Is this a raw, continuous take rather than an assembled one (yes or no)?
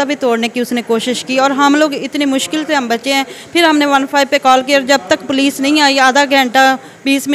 yes